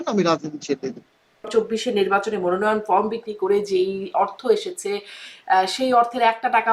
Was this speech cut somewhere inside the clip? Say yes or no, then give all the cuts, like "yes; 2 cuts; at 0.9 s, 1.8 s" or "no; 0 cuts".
yes; 1 cut; at 1.5 s